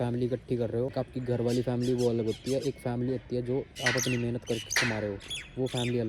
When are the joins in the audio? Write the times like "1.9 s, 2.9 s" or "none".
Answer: 0.9 s, 3.7 s

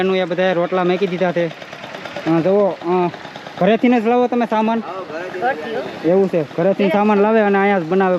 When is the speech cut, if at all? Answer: none

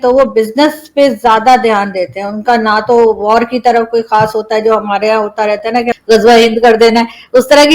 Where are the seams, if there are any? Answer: 6.0 s

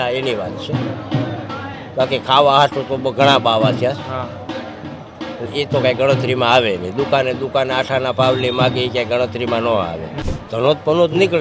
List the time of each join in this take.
10.2 s

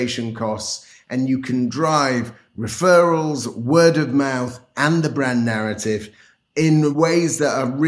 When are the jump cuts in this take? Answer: 6.9 s

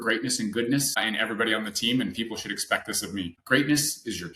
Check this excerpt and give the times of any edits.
1.0 s, 3.4 s

